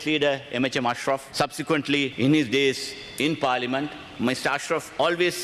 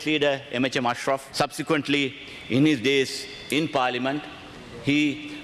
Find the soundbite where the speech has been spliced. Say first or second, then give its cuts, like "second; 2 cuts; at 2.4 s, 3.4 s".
first; 2 cuts; at 2.1 s, 4.0 s